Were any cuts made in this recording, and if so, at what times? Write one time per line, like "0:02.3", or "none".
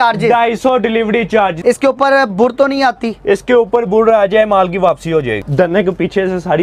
0:01.6
0:05.4

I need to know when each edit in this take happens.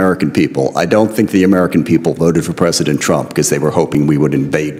none

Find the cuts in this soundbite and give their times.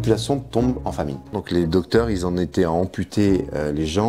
0:01.3

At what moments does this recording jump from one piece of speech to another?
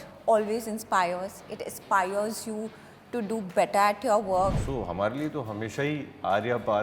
0:04.6

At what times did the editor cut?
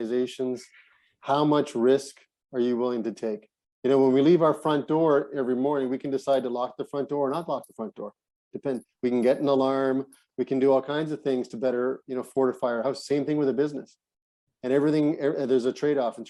none

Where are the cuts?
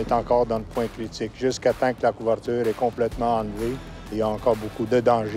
0:04.1

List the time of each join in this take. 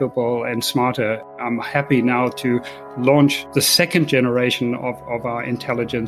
0:01.3

